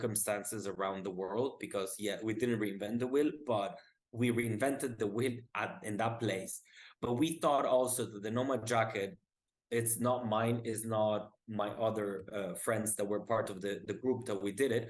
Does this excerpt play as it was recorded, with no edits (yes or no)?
yes